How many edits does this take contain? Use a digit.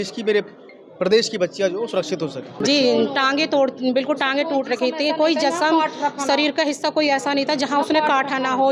1